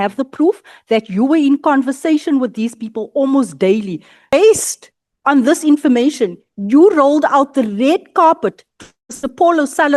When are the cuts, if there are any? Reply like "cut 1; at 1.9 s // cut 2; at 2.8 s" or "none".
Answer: cut 1; at 4.3 s